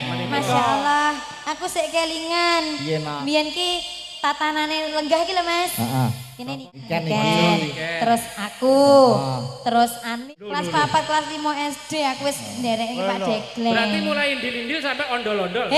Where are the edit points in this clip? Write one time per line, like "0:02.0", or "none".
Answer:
0:06.6
0:10.1